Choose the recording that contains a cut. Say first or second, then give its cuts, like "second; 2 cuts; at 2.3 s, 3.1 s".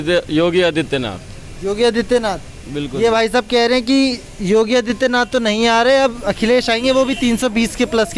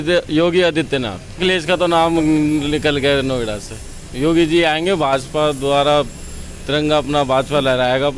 second; 1 cut; at 1.4 s